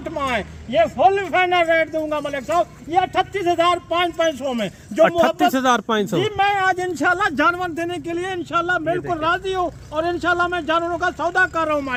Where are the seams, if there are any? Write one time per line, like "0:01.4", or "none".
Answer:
none